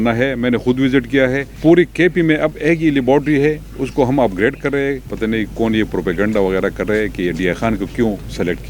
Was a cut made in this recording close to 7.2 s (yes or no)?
no